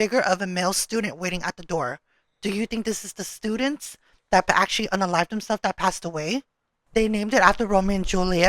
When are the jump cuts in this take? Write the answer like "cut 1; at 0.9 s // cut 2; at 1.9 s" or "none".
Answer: cut 1; at 6.8 s